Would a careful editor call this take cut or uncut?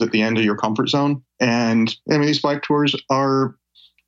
cut